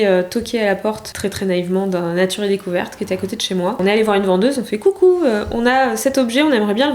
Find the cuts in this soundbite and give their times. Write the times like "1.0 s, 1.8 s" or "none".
1.0 s, 3.8 s